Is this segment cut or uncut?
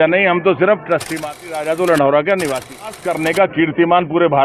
cut